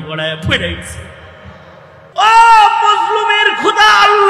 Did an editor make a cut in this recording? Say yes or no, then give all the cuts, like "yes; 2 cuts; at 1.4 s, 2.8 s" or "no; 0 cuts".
yes; 1 cut; at 2.0 s